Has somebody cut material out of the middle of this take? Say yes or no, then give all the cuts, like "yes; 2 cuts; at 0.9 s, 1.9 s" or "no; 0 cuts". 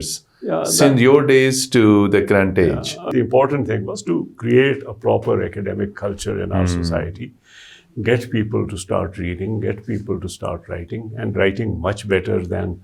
yes; 1 cut; at 3.1 s